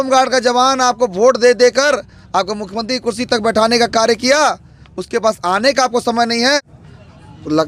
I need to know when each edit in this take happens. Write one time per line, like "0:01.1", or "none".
0:06.7